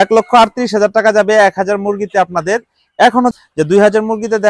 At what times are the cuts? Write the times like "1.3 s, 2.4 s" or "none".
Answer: 3.4 s